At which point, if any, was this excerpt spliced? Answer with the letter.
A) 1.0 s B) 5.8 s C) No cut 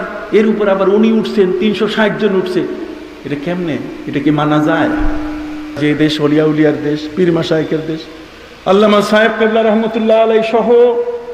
B